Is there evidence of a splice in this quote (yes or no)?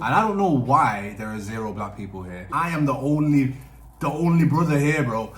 yes